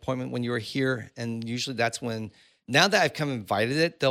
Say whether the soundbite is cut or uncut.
uncut